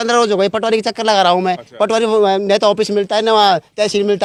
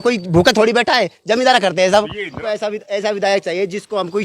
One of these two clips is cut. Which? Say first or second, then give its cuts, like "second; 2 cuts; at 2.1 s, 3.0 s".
second; 1 cut; at 2.2 s